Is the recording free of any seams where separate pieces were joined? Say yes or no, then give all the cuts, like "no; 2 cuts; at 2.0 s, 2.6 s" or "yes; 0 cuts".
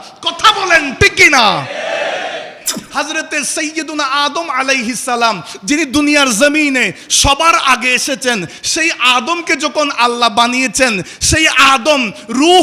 no; 1 cut; at 2.8 s